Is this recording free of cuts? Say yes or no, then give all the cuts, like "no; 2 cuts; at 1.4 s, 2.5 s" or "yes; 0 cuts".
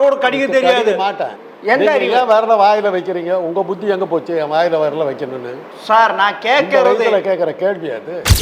no; 1 cut; at 1.3 s